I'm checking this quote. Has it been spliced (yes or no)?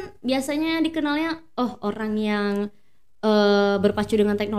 no